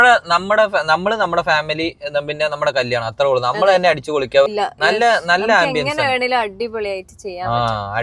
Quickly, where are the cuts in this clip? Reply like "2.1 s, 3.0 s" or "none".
4.5 s